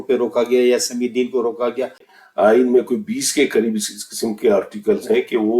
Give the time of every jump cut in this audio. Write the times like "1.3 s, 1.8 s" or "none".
2.1 s